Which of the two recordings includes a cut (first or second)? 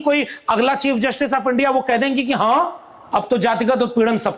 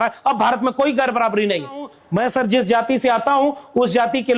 second